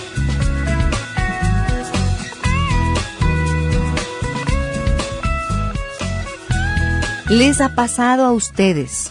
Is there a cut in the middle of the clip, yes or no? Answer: yes